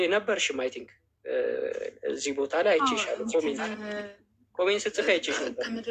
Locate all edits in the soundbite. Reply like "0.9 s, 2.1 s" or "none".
none